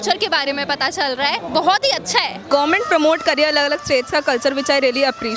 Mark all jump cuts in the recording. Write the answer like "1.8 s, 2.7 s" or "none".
1.4 s, 2.4 s